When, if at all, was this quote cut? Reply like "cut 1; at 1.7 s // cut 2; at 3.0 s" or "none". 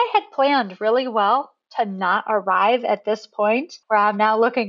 cut 1; at 3.7 s